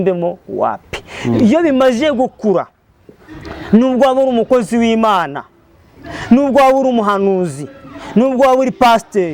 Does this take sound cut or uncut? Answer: uncut